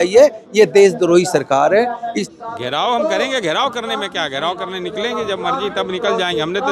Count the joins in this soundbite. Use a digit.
1